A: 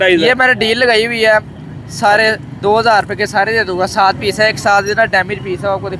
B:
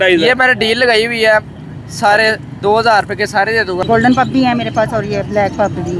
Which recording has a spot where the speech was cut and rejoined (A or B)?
B